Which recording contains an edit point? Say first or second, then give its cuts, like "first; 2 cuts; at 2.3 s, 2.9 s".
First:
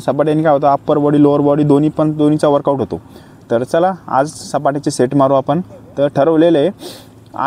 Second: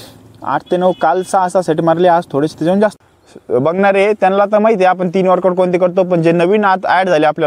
second; 1 cut; at 3.0 s